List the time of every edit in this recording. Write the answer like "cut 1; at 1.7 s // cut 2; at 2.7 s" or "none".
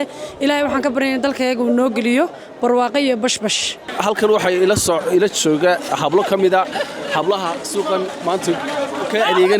cut 1; at 3.9 s